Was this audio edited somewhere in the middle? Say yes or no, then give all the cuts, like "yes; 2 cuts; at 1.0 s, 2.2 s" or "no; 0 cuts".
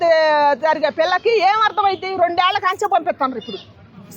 no; 0 cuts